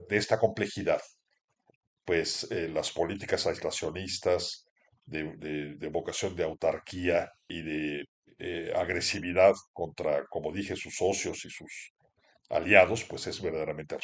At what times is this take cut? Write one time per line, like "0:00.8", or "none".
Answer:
0:07.5
0:08.2